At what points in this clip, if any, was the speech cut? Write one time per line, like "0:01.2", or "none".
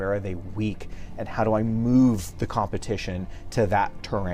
none